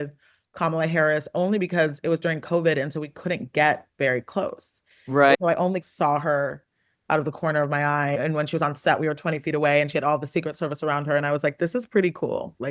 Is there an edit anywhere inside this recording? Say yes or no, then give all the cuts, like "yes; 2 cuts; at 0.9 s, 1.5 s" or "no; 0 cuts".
no; 0 cuts